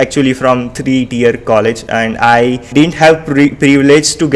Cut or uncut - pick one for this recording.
cut